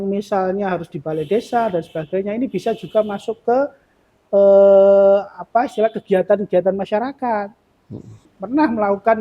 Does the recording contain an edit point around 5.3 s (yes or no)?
no